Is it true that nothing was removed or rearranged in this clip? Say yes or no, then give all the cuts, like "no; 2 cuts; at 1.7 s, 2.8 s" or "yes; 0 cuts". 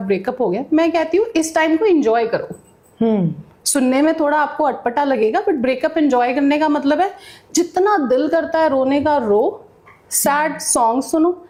yes; 0 cuts